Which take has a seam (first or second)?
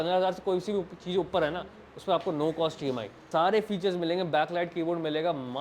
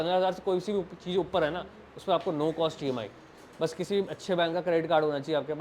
first